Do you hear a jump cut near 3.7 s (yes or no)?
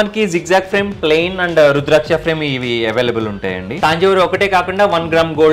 yes